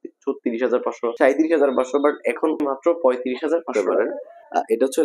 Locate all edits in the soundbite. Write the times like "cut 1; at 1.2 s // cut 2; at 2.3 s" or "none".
cut 1; at 1.1 s // cut 2; at 2.6 s // cut 3; at 3.7 s